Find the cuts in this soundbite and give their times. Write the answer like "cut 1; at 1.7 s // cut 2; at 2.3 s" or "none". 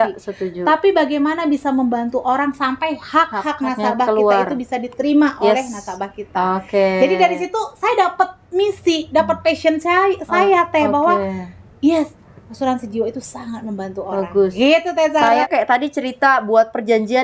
cut 1; at 15.5 s